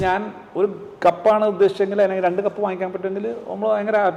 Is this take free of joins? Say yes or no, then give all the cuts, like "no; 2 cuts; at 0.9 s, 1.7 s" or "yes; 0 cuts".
yes; 0 cuts